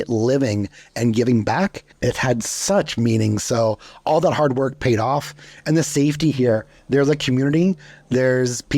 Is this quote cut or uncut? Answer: cut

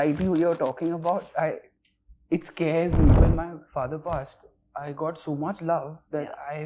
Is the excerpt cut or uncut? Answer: cut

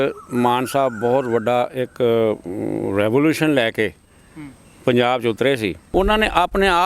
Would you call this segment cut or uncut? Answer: cut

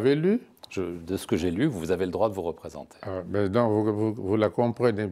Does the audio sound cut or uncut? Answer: uncut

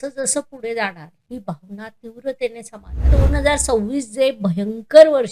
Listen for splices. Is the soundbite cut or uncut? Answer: cut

